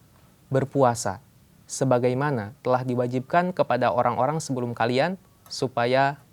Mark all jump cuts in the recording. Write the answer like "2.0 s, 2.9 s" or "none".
none